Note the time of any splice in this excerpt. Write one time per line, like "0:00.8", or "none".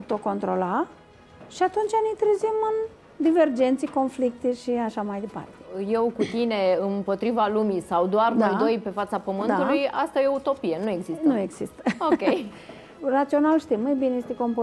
0:05.8
0:12.9